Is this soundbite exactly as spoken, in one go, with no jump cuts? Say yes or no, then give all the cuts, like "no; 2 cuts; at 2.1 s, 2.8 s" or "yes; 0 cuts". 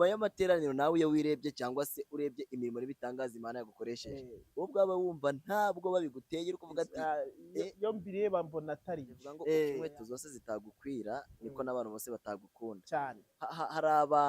no; 1 cut; at 9.8 s